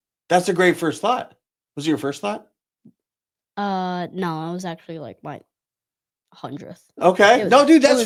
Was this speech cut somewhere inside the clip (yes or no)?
no